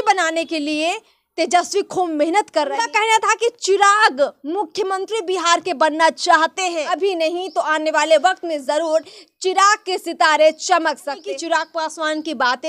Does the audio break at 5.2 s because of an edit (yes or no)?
no